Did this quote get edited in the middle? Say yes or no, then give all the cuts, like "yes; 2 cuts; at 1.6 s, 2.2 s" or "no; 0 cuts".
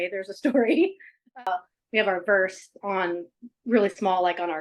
yes; 1 cut; at 1.4 s